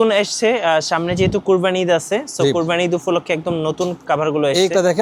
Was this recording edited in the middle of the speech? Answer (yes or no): no